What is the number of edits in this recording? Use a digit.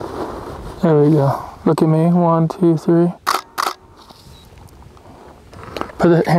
0